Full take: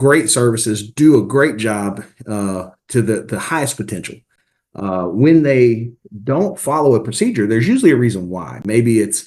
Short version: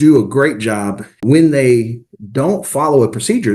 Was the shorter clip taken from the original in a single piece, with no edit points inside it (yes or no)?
no